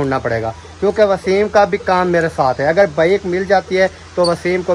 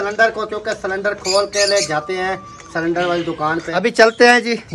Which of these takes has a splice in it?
second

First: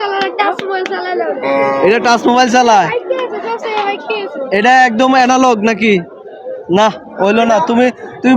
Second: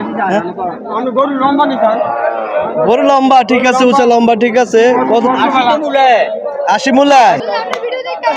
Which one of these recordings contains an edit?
second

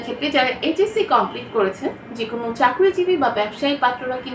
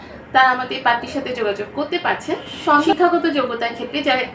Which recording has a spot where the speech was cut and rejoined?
second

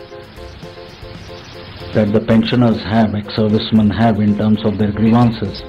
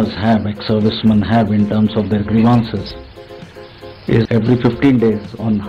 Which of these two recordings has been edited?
second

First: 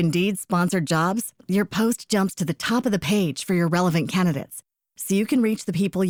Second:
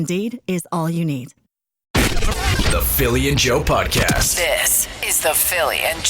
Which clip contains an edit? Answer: second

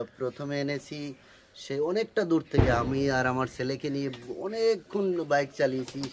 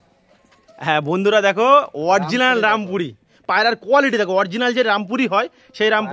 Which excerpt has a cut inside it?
second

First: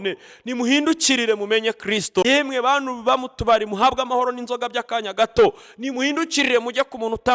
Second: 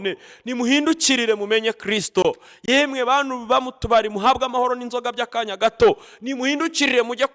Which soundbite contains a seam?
first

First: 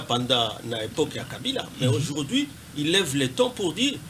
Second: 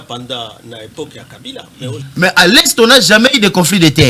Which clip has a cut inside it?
second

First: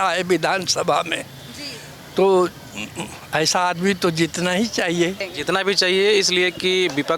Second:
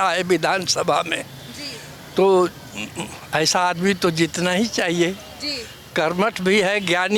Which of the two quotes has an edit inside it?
first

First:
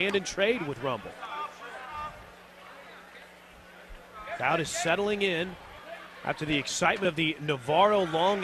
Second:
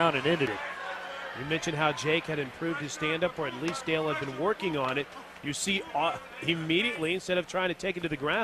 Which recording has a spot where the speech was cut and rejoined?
first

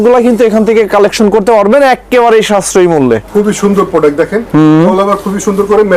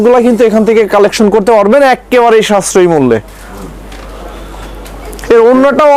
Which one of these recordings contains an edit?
first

